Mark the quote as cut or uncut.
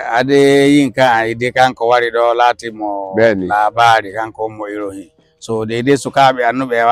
uncut